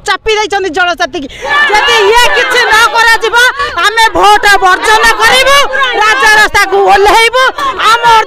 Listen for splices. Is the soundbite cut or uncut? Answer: cut